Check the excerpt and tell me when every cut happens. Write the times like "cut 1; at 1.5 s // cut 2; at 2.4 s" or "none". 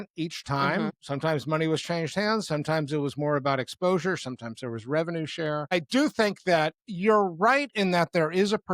cut 1; at 1.0 s // cut 2; at 5.7 s